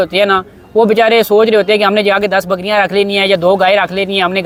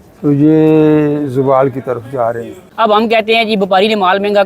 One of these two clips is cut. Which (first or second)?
second